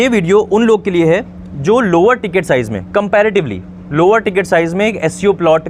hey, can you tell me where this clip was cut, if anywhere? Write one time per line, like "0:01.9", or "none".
none